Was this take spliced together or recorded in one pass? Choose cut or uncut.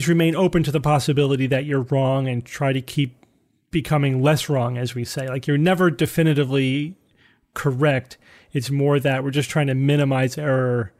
uncut